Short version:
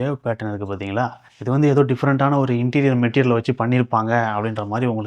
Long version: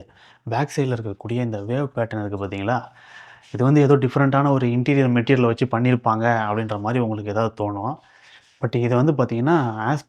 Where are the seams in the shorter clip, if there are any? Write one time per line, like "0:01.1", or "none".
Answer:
0:01.3